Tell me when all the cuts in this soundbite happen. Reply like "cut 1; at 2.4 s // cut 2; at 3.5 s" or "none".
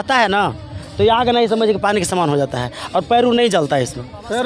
none